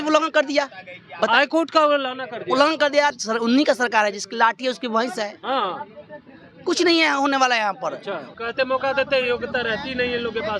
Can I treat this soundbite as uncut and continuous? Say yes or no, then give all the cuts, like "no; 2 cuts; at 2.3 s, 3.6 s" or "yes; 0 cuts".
no; 2 cuts; at 3.1 s, 8.3 s